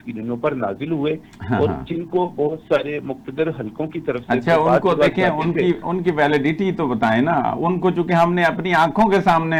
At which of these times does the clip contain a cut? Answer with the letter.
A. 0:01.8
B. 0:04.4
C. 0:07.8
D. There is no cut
D